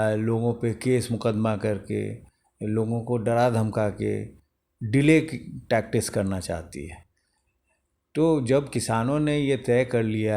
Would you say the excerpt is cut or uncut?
uncut